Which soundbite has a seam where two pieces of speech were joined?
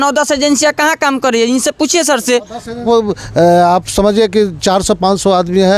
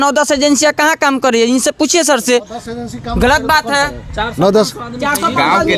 first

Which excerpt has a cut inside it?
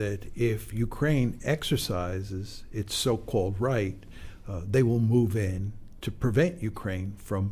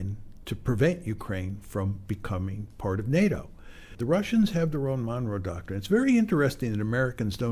second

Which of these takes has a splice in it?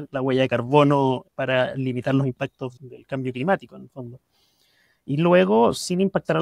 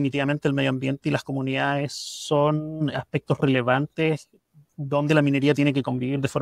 first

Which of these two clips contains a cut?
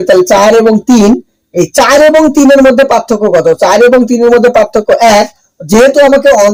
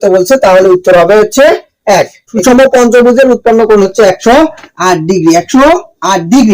second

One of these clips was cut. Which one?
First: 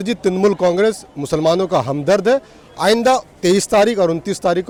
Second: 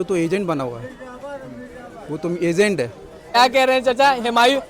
second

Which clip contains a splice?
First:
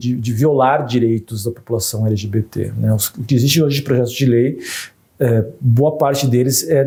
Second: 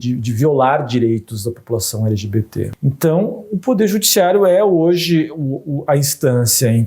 second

